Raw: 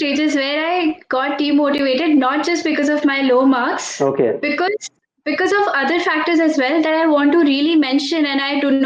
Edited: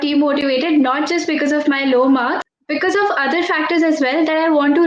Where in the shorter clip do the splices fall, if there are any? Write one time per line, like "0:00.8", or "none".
0:02.5